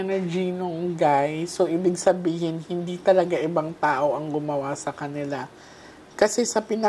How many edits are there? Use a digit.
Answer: 0